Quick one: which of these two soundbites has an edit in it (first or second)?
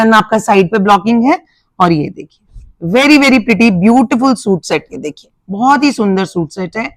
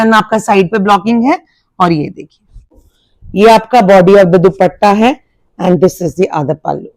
second